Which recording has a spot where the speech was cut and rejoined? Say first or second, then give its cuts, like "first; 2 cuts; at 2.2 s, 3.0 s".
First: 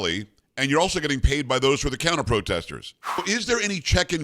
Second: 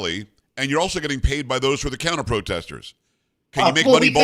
first; 1 cut; at 3.2 s